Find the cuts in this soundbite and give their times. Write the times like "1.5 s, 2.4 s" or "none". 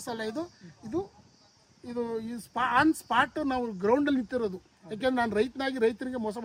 none